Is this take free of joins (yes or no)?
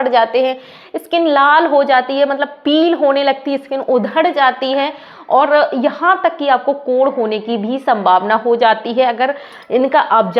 yes